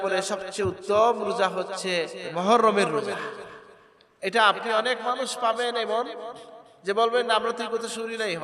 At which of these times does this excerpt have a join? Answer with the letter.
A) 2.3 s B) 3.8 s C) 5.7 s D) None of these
A